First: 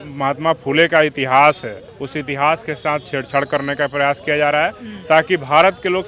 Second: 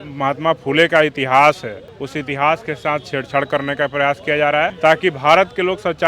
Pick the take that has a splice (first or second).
second